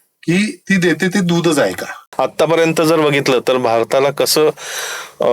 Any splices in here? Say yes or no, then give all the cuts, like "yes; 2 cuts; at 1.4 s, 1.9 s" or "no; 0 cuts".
yes; 1 cut; at 2.0 s